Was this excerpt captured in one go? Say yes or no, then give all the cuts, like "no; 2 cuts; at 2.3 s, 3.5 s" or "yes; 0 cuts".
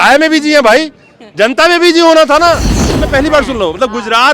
no; 1 cut; at 3.0 s